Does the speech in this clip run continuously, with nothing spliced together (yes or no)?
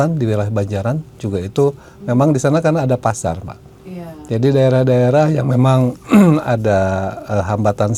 yes